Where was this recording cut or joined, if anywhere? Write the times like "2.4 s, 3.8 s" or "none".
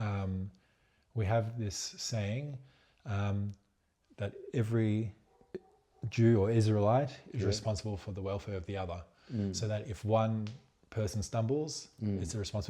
none